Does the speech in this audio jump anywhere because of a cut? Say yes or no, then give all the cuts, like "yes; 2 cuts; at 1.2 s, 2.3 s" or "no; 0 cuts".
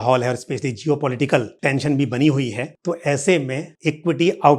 yes; 3 cuts; at 1.5 s, 2.7 s, 3.7 s